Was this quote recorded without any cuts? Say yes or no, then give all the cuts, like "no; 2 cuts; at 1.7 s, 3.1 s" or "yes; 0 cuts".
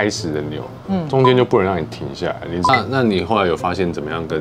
no; 1 cut; at 2.5 s